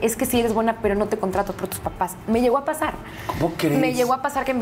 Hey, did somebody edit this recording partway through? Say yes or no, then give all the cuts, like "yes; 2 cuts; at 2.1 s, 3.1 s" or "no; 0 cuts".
no; 0 cuts